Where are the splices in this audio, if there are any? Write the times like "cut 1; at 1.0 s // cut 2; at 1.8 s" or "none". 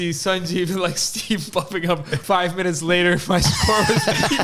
cut 1; at 2.1 s